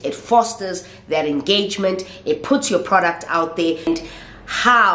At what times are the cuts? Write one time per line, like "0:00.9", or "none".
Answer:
0:03.8